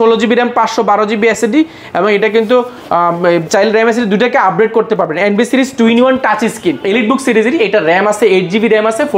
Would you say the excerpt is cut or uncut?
cut